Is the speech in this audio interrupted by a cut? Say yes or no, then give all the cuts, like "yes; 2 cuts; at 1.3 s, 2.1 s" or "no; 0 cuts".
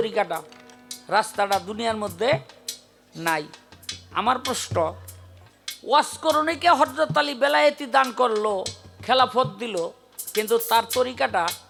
no; 0 cuts